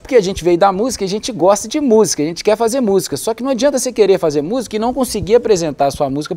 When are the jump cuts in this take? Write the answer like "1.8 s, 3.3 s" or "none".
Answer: none